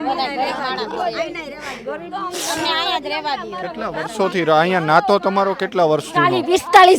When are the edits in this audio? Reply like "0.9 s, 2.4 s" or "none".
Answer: none

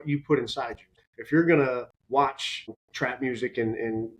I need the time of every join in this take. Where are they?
1.0 s, 2.4 s

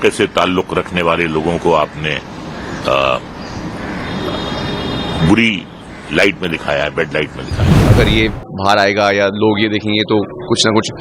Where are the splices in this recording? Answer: 7.9 s

